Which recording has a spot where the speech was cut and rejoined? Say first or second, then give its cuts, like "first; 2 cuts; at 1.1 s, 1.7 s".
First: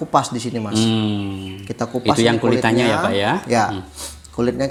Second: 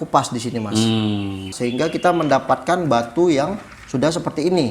second; 1 cut; at 1.5 s